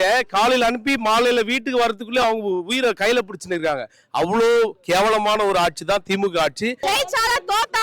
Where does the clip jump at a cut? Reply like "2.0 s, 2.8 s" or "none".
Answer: 6.8 s